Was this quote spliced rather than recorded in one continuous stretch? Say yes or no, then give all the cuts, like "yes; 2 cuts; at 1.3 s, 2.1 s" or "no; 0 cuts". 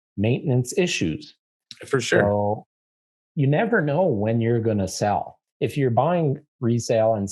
yes; 1 cut; at 5.4 s